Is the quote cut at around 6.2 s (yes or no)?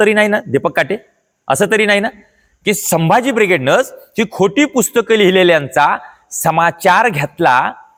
no